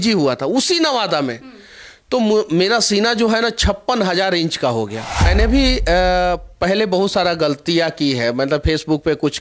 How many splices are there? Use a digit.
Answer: 1